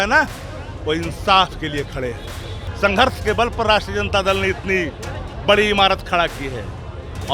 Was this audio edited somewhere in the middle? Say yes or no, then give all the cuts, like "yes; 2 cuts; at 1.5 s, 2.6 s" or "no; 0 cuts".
yes; 1 cut; at 2.7 s